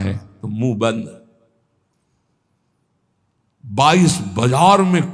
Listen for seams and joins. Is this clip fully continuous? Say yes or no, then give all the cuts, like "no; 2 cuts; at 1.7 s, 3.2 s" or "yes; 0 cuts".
yes; 0 cuts